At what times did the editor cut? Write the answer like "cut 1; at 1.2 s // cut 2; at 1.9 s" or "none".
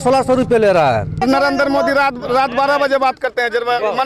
cut 1; at 1.2 s